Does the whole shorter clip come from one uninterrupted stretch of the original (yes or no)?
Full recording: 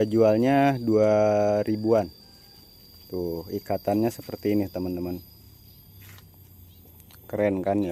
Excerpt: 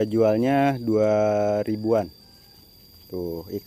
yes